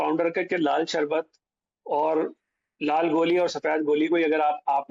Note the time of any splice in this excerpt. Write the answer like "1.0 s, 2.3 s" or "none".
none